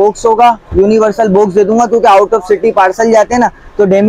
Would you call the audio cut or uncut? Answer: uncut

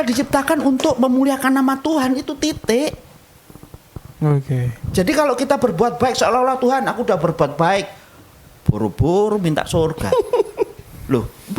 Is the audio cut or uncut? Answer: uncut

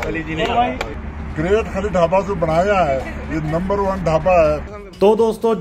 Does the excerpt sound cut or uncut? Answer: cut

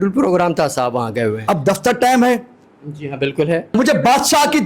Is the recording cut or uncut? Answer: cut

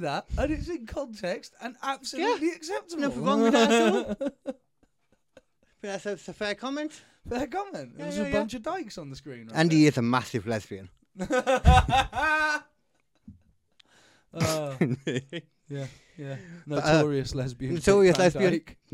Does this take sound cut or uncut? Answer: uncut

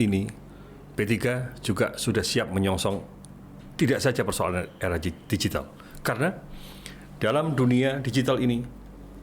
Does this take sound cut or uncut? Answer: uncut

